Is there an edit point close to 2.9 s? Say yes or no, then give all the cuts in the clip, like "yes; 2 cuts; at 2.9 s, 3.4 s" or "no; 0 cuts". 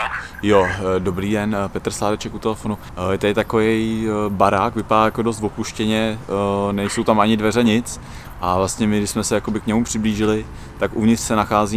yes; 1 cut; at 2.9 s